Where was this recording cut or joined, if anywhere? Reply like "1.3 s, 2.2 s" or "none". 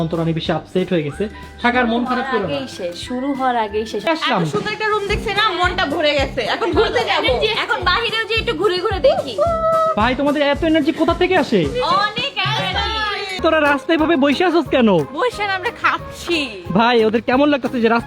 4.1 s, 13.4 s